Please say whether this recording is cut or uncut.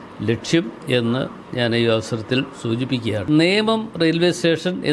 cut